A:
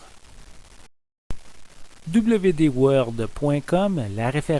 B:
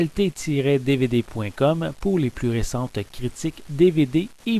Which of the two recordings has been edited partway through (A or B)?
A